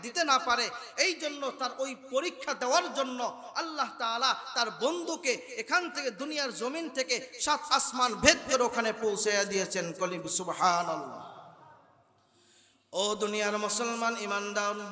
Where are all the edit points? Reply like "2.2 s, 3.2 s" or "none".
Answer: none